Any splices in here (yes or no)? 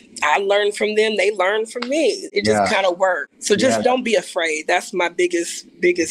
yes